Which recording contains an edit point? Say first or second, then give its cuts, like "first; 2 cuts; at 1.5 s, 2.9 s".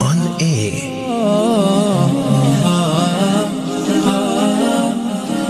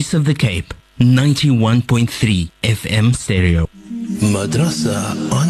second; 1 cut; at 3.6 s